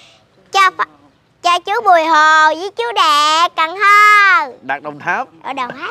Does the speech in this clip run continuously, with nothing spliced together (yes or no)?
yes